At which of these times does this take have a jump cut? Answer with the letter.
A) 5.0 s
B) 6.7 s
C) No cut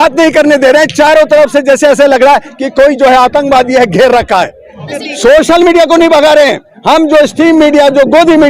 A